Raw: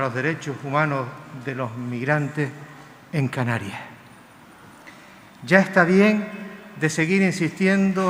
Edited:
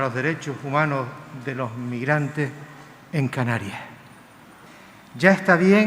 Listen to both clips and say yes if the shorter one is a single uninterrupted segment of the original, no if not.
no